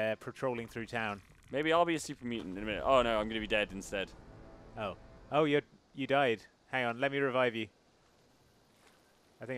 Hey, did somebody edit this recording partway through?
yes; 2 cuts; at 1.3 s, 5.3 s

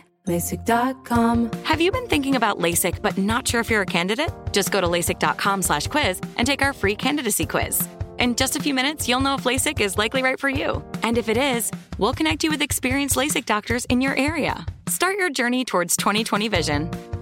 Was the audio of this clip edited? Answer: yes; 1 cut; at 1.3 s

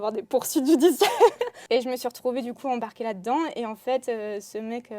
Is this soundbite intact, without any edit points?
no; 1 cut; at 1.5 s

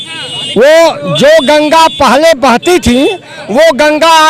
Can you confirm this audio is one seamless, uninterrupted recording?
yes; 0 cuts

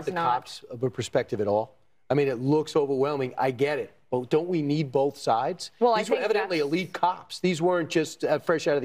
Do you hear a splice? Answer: yes; 2 cuts; at 4.8 s, 8.1 s

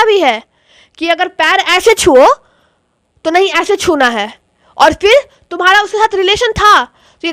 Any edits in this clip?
no; 0 cuts

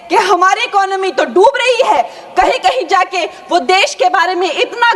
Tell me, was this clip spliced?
no; 0 cuts

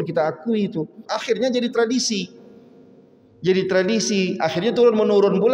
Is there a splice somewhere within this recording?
yes; 1 cut; at 1.1 s

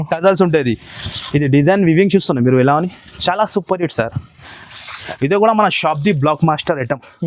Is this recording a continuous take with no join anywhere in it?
no; 1 cut; at 5.0 s

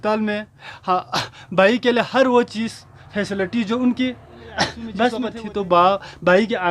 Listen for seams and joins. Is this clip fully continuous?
no; 1 cut; at 5.3 s

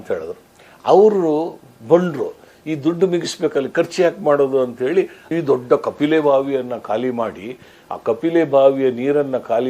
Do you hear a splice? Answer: yes; 1 cut; at 5.3 s

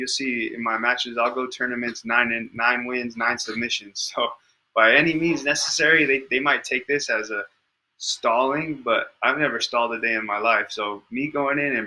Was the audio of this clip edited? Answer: no; 0 cuts

